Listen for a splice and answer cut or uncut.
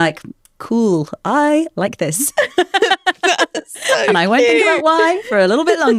uncut